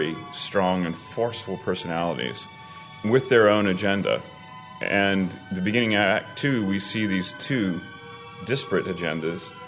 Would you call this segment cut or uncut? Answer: uncut